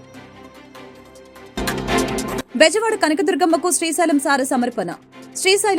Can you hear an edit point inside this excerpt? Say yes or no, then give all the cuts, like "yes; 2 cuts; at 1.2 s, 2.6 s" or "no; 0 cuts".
yes; 2 cuts; at 1.4 s, 2.5 s